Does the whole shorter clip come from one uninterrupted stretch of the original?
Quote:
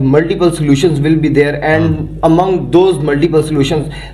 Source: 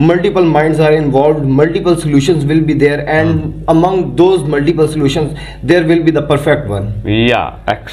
yes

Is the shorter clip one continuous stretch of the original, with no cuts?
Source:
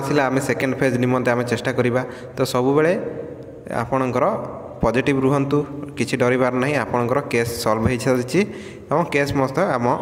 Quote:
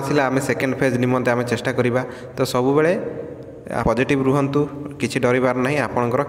no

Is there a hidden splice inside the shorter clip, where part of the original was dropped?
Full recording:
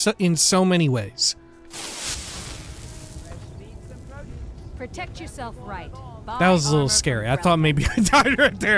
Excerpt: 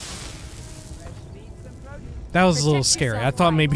yes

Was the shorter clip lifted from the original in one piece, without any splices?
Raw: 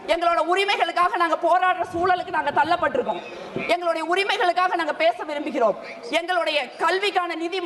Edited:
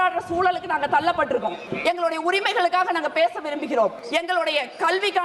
no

